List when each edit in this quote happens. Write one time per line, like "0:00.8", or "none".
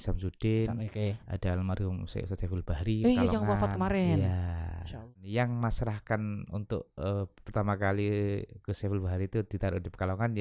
0:05.1